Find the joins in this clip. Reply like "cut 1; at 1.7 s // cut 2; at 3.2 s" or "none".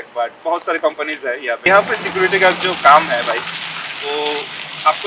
cut 1; at 1.6 s